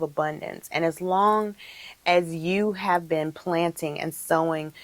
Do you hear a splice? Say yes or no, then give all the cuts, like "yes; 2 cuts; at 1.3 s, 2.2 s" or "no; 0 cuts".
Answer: no; 0 cuts